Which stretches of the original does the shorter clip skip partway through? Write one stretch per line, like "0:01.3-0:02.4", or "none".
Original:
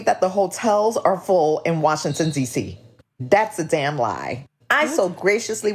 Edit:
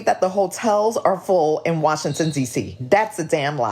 0:02.7-0:03.1